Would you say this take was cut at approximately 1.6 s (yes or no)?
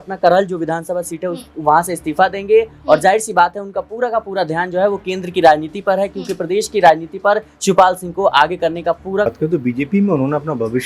no